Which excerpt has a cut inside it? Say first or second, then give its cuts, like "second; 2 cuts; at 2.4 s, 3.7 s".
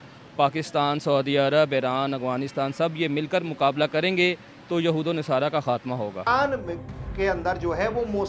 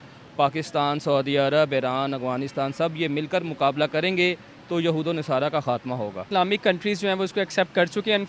first; 1 cut; at 6.3 s